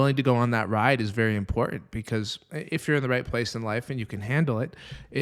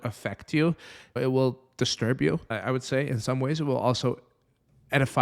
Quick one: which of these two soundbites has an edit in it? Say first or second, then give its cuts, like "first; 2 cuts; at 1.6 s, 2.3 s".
second; 2 cuts; at 1.1 s, 2.5 s